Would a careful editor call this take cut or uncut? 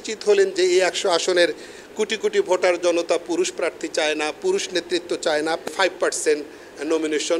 cut